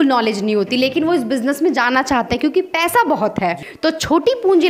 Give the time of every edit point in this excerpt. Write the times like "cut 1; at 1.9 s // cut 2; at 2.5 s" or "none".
cut 1; at 3.7 s